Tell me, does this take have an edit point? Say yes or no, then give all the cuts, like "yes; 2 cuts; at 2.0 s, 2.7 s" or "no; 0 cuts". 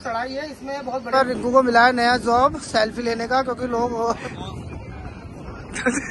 yes; 2 cuts; at 1.1 s, 4.2 s